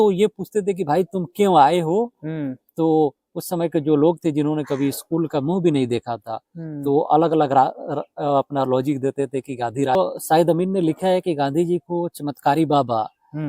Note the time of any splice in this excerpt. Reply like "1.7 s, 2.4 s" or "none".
10.0 s

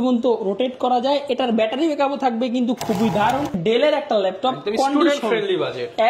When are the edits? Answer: 3.6 s

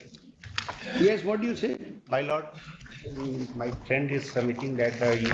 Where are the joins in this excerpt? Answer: none

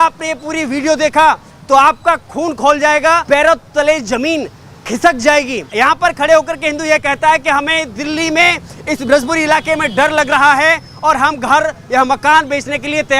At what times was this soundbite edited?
3.2 s, 5.6 s

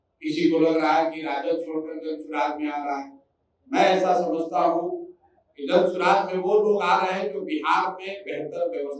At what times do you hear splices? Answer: none

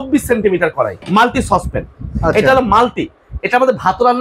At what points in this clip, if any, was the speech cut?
0.9 s

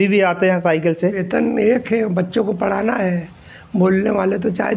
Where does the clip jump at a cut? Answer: 1.2 s

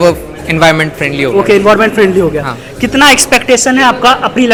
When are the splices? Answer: none

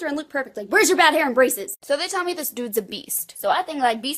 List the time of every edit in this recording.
1.8 s

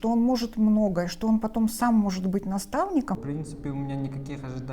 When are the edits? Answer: 3.2 s

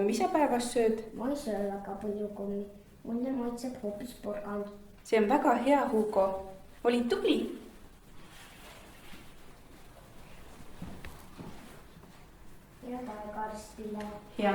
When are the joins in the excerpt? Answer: 10.0 s

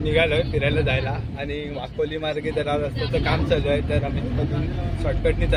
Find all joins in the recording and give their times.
none

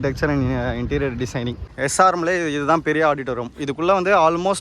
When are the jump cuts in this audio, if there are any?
1.6 s

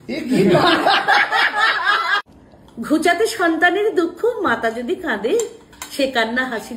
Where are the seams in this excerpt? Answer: 2.2 s

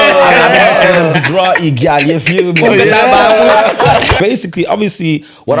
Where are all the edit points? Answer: 4.2 s

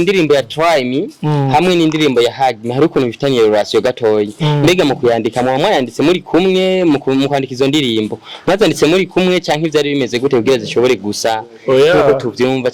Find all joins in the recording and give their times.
none

